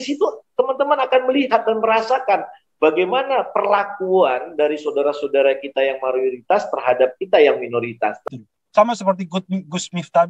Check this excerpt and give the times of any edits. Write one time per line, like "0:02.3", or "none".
0:08.2

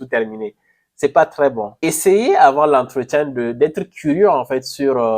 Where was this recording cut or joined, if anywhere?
0:01.7

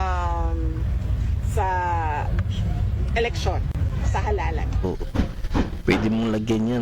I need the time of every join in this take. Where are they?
0:04.8

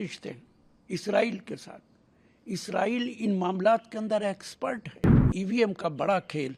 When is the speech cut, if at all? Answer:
0:05.3

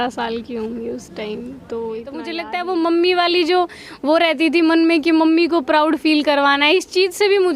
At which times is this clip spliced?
0:02.5

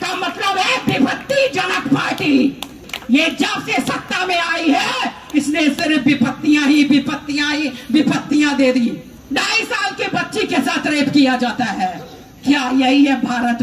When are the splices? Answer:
0:02.9
0:09.1

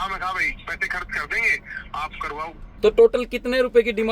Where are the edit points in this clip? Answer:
0:02.7

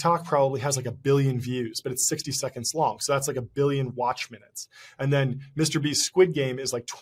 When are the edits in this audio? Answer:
none

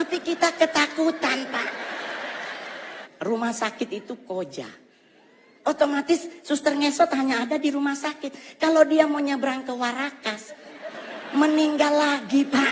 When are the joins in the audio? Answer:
0:03.0

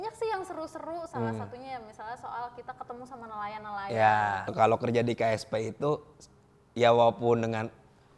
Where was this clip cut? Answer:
0:04.5

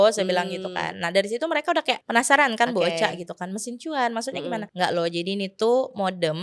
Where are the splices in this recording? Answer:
0:02.0
0:04.7

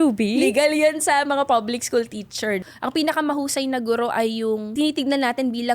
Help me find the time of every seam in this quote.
0:02.6
0:04.7

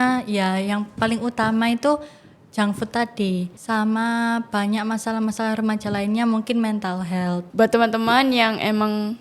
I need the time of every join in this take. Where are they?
0:03.5
0:07.4

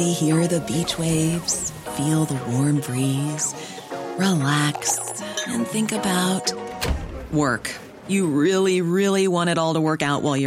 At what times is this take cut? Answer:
none

